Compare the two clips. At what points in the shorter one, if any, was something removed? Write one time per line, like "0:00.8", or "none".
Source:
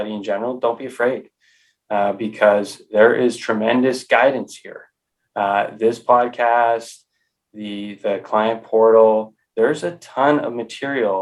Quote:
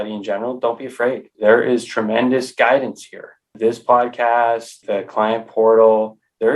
0:01.3
0:03.5
0:04.7